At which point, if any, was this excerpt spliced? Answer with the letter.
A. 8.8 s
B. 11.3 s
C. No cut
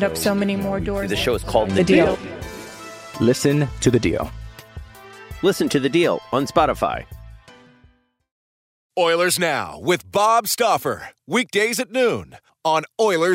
A